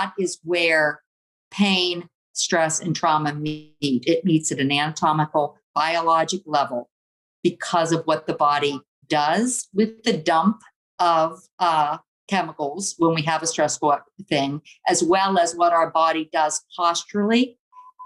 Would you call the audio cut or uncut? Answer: uncut